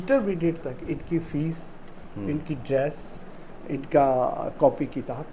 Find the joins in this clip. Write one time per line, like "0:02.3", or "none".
none